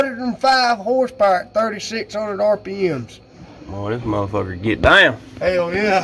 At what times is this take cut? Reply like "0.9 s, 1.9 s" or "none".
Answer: none

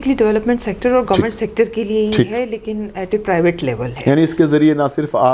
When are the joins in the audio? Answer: 3.9 s

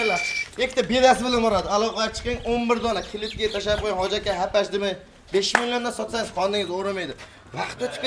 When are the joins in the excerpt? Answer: none

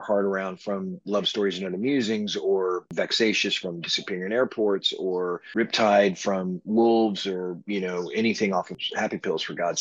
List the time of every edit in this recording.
2.9 s, 8.8 s

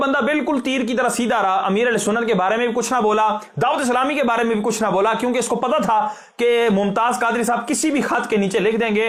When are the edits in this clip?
none

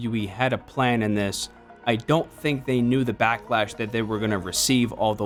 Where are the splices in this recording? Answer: none

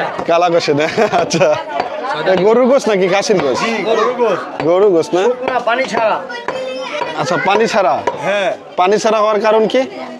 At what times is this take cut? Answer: none

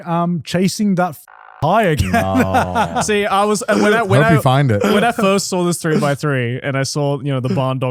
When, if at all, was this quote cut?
none

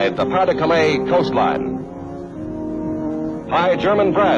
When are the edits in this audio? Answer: 2.6 s

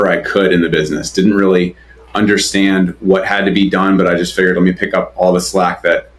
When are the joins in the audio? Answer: none

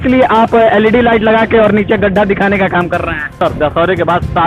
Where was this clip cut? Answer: 3.3 s

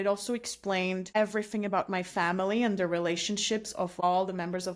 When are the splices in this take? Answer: none

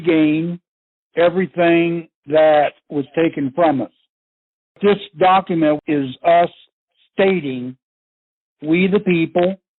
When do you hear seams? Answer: 4.8 s, 5.8 s

